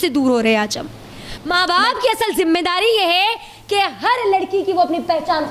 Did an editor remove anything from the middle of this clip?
yes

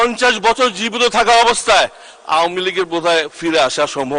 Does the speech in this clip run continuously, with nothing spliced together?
yes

